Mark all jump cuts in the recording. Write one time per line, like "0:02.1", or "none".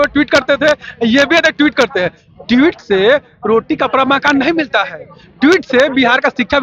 none